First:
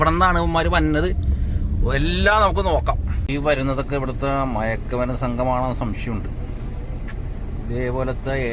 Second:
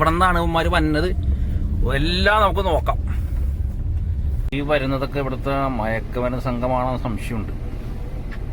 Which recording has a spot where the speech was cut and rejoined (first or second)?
first